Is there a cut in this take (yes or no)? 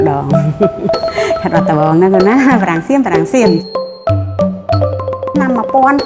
no